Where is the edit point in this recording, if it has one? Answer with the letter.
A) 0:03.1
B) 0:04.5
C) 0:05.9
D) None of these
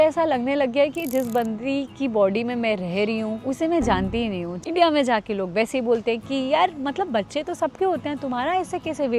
B